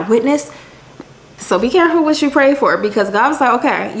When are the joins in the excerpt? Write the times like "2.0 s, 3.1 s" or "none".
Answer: 1.4 s